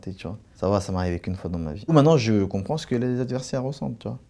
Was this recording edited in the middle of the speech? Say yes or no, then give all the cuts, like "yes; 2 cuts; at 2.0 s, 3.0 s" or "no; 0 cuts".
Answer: yes; 1 cut; at 1.9 s